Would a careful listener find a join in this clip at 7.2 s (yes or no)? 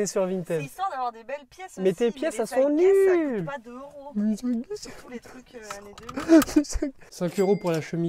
yes